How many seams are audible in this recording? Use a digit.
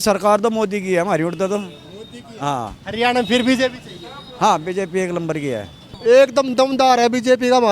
1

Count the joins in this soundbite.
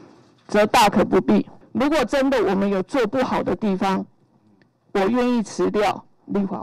1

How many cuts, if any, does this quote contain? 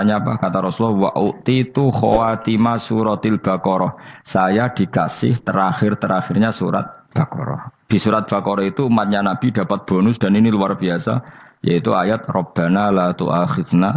1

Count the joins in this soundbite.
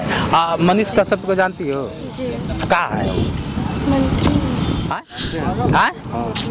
1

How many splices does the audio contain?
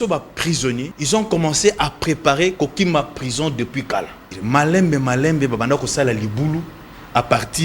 2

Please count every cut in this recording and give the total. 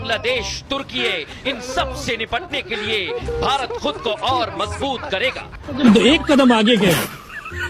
1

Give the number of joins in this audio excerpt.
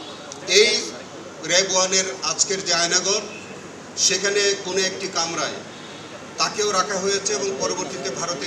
0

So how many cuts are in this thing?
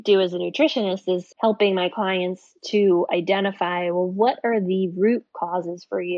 1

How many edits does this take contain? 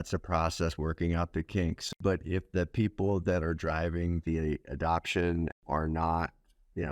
2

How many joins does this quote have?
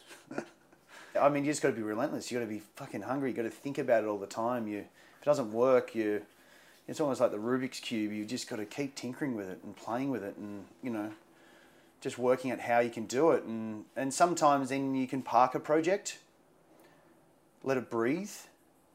1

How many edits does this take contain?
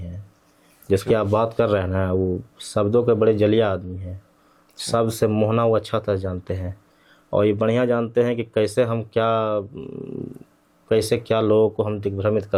0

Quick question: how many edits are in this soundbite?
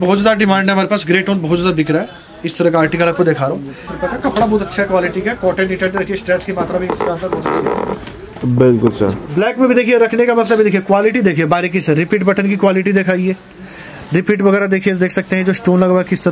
2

